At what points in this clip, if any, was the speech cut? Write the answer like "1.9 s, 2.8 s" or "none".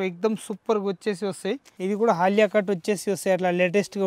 1.7 s